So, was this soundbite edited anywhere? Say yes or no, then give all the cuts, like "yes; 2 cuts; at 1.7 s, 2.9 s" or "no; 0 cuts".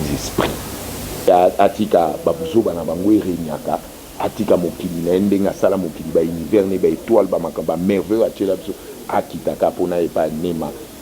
yes; 1 cut; at 1.3 s